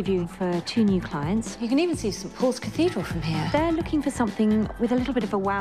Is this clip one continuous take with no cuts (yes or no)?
no